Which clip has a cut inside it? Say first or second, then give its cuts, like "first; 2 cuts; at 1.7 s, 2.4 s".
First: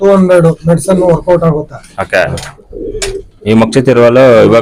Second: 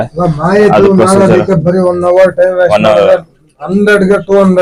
first; 1 cut; at 2.4 s